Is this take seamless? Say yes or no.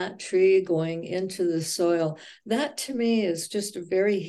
yes